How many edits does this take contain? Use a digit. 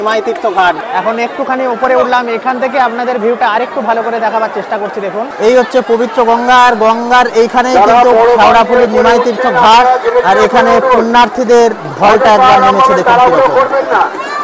0